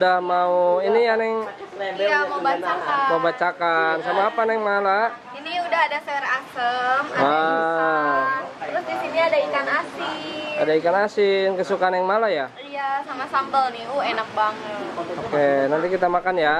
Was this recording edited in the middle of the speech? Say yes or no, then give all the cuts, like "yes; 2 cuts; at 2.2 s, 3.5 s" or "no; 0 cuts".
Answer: no; 0 cuts